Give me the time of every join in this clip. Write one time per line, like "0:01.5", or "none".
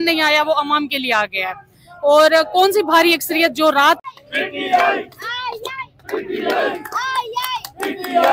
0:04.0

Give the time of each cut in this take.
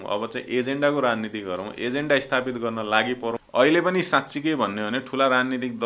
0:03.4

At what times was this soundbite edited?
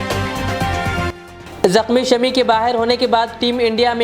0:01.1

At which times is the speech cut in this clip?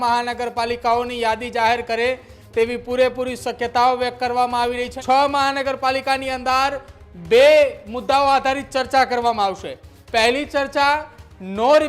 0:04.9

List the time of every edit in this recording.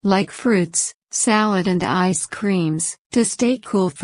0:02.9

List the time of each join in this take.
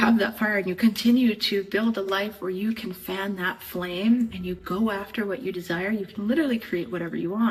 none

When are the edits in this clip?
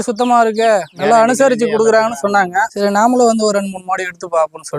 0:00.9
0:02.7

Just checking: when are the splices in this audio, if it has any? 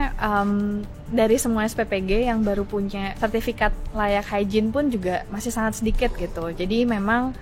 0:03.1

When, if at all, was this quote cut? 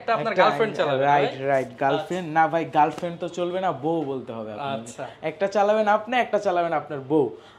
none

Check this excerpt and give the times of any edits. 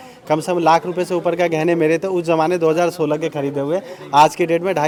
none

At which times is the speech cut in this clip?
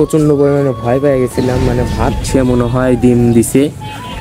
0:02.2

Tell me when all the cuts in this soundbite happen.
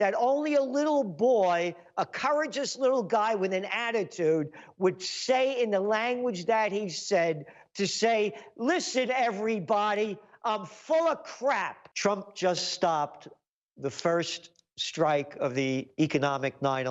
0:11.8

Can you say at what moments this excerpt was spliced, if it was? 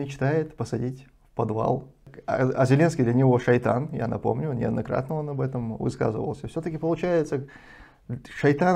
0:02.1

